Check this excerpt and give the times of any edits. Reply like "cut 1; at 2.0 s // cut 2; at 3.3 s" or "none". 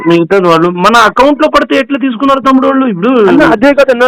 none